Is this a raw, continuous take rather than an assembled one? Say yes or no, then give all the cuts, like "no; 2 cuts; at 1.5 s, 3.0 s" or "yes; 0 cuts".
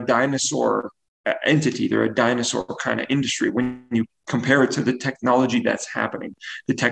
yes; 0 cuts